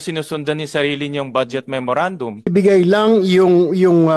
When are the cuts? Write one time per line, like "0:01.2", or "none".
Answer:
0:02.5